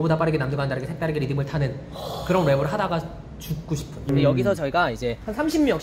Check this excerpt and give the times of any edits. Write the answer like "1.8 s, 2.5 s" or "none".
1.7 s, 4.1 s